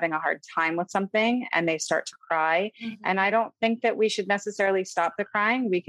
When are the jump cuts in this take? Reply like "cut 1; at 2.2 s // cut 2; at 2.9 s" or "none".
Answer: none